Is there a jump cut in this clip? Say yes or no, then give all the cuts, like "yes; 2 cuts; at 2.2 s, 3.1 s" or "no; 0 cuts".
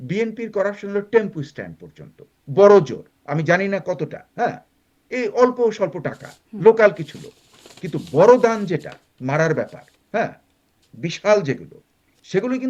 no; 0 cuts